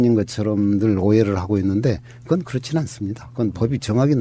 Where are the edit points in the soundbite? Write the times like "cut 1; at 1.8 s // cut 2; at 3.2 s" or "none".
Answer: none